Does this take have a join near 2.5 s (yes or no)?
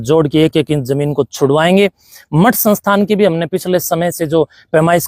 no